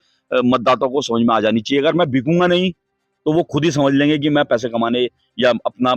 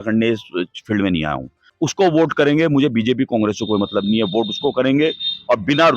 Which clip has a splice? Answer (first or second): second